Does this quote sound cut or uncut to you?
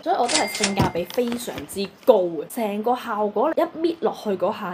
cut